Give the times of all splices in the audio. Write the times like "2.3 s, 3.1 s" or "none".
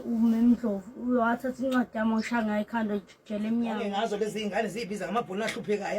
4.2 s